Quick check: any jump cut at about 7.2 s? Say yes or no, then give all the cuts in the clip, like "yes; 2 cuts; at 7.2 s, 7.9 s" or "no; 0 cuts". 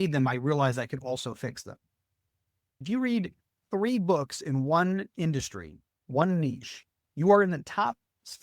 no; 1 cut; at 2.8 s